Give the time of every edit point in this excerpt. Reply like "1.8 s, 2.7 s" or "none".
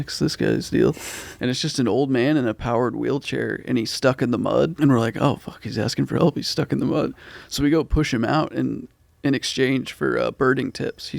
4.7 s